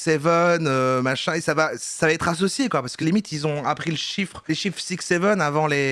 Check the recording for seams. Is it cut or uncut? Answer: uncut